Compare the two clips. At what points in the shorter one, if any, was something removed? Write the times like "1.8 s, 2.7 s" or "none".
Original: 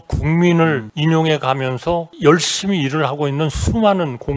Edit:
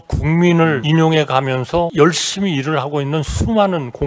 0.8 s, 1.9 s